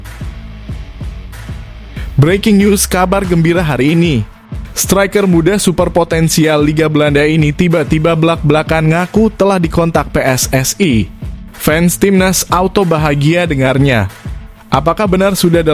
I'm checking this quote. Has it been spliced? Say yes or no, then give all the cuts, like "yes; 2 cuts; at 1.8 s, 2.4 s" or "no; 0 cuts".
yes; 1 cut; at 2.1 s